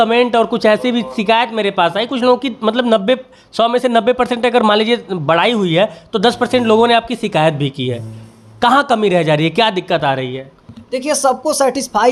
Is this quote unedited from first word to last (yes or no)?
yes